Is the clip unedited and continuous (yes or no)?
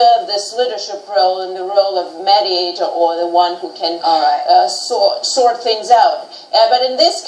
no